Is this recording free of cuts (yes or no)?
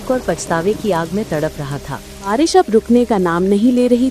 no